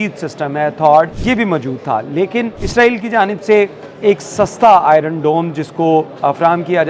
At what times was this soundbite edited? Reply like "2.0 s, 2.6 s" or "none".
1.2 s, 2.6 s